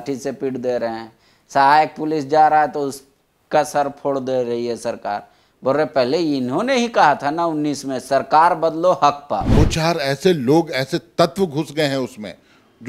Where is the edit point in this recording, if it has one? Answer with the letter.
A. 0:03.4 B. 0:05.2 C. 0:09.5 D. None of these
C